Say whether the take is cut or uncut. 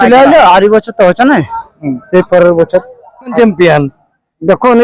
cut